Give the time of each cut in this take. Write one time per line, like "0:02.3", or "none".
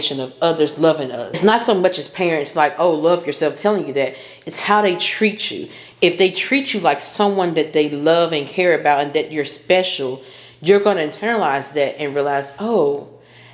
0:01.4